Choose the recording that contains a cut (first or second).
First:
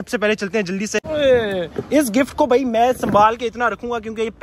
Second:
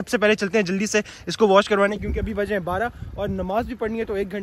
first